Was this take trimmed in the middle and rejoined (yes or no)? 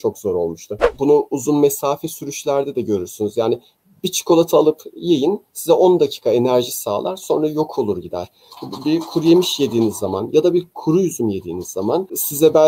yes